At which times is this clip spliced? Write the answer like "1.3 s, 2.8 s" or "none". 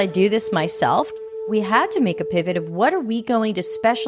1.2 s